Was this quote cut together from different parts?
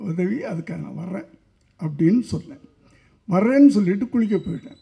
no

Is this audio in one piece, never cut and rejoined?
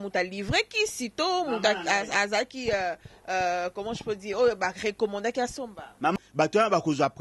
no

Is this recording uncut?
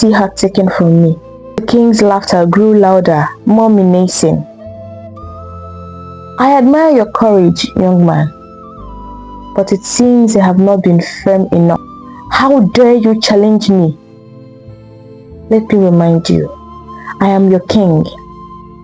no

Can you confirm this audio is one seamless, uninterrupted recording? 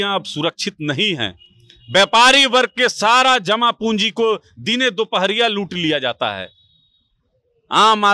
yes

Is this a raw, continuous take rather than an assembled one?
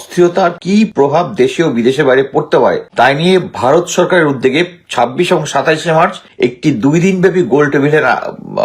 no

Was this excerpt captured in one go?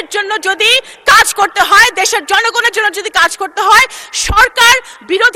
yes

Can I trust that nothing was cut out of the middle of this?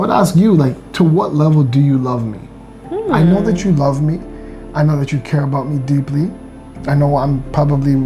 yes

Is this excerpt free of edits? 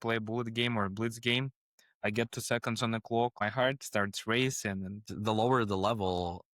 no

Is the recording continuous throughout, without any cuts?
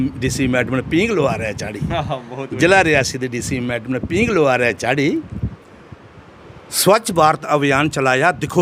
yes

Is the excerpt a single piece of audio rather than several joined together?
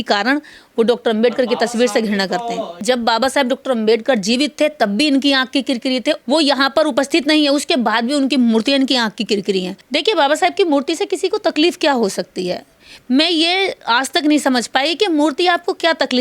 no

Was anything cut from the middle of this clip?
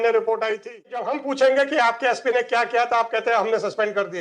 yes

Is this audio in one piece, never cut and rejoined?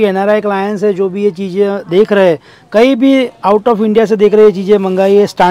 yes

